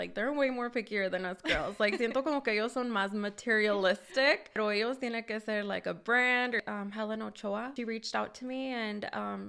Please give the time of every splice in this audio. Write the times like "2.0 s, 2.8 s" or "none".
4.6 s, 6.6 s, 7.7 s